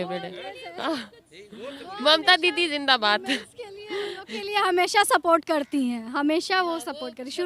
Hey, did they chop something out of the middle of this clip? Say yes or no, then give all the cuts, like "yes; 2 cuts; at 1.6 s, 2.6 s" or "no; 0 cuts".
no; 0 cuts